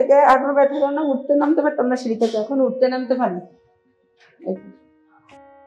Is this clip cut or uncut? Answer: cut